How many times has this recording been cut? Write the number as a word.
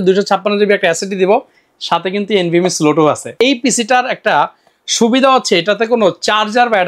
one